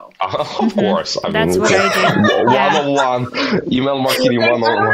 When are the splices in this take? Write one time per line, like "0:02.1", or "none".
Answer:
none